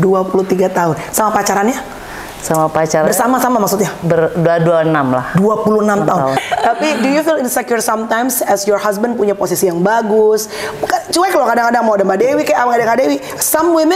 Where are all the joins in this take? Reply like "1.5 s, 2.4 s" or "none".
6.4 s